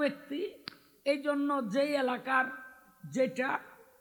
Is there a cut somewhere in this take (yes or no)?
no